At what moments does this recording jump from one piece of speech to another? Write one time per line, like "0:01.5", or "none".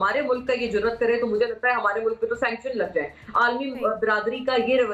none